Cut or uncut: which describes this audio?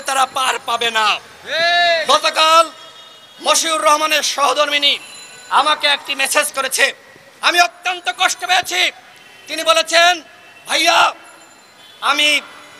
cut